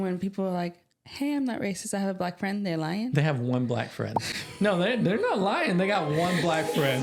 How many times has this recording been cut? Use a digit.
0